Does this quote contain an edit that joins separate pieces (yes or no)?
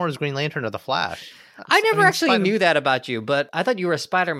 yes